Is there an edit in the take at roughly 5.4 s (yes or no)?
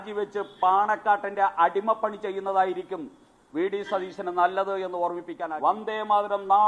yes